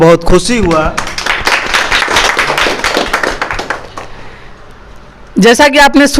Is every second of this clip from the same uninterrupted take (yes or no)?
yes